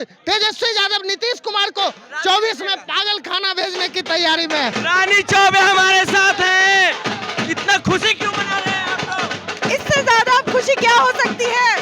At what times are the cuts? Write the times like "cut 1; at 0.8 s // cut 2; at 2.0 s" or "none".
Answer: cut 1; at 4.8 s